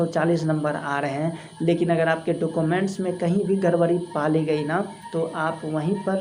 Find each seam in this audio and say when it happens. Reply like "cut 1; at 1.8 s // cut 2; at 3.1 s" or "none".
none